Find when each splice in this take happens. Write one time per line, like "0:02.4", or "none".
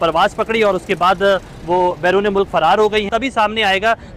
0:03.1

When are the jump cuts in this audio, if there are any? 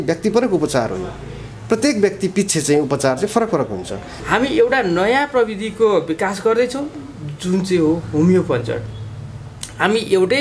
0:04.1

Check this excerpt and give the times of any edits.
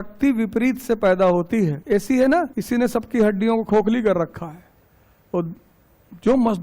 0:01.8
0:02.6

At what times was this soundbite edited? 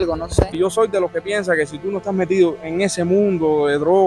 0:00.9

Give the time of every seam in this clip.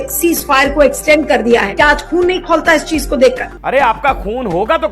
0:03.5

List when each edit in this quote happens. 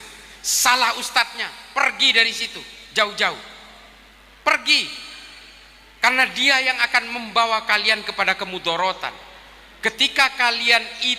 none

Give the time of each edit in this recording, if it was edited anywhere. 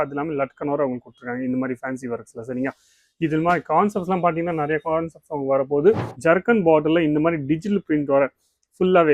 0:06.1

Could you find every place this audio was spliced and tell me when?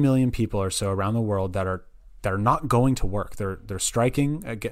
none

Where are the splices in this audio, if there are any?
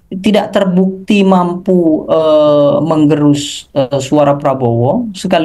none

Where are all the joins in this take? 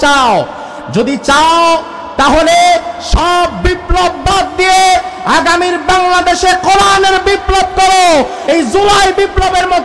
0:08.4

